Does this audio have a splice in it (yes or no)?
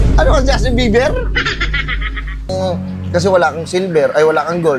yes